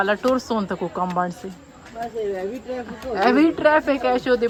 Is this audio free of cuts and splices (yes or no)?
yes